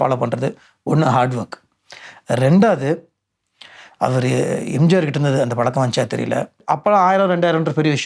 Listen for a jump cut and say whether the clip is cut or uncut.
cut